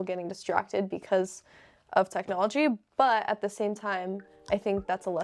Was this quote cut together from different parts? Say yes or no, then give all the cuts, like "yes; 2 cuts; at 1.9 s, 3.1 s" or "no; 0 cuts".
no; 0 cuts